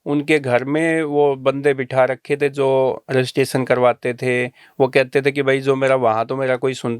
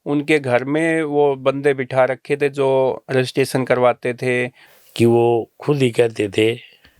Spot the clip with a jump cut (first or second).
second